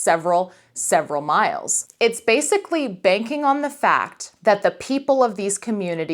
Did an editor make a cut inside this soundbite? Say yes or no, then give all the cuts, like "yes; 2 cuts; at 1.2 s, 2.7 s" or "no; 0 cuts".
yes; 1 cut; at 1.7 s